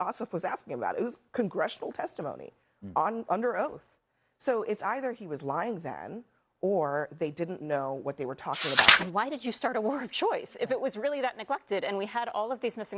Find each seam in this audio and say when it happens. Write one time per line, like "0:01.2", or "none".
0:08.9